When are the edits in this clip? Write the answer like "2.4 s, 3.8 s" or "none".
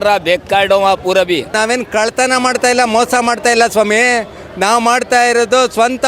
1.5 s